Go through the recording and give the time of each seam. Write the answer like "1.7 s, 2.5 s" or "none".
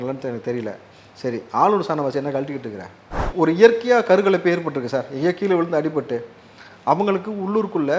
3.3 s